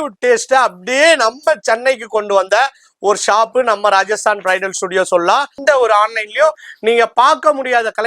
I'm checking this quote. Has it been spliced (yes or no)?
yes